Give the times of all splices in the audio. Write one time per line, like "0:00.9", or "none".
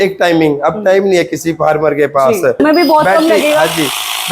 0:02.6

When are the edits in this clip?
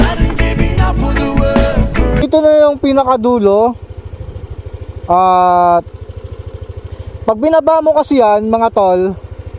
0:02.3

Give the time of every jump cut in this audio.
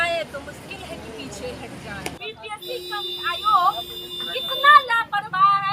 0:02.2

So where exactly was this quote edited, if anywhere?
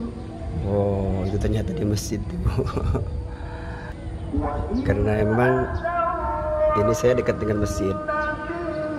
0:03.9

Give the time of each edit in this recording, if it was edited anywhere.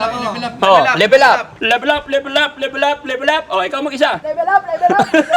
0:01.5
0:04.2

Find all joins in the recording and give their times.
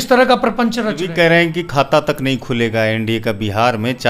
0:01.0

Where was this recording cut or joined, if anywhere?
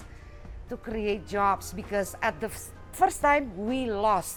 none

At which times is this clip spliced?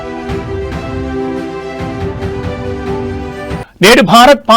0:03.0

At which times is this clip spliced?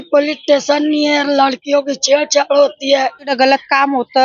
0:03.3

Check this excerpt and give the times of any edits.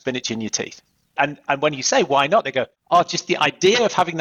0:01.1
0:02.8

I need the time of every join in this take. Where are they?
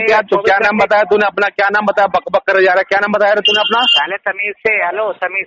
none

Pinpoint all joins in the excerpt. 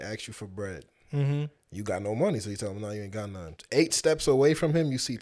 0:03.5

